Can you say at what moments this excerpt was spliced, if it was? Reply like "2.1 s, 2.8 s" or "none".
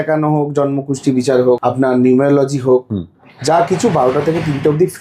1.6 s